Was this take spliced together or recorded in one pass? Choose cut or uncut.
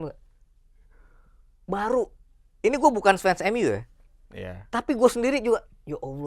uncut